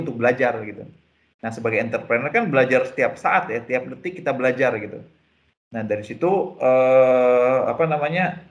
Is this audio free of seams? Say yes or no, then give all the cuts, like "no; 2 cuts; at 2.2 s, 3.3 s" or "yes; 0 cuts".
yes; 0 cuts